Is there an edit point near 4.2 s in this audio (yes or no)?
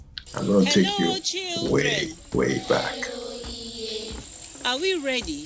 yes